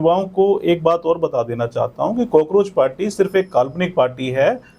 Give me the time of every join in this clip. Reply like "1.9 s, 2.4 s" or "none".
none